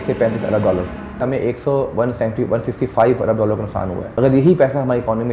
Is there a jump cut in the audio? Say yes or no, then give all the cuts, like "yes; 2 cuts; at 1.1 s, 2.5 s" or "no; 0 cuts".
yes; 2 cuts; at 1.2 s, 4.1 s